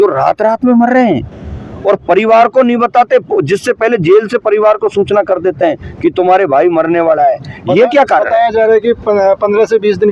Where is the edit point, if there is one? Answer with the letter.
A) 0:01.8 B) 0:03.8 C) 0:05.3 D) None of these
D